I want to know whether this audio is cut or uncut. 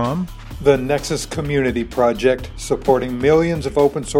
uncut